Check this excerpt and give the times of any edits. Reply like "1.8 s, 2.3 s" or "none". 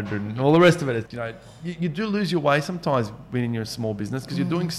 1.1 s